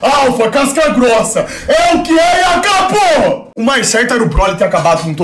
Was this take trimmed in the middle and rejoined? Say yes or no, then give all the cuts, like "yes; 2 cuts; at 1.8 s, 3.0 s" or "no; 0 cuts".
yes; 1 cut; at 3.5 s